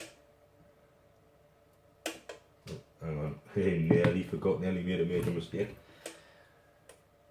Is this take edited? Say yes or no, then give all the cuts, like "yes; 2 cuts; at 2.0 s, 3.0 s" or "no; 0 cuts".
no; 0 cuts